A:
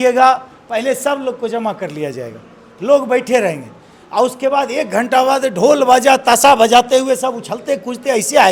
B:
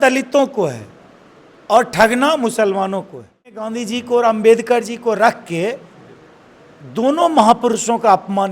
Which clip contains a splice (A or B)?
B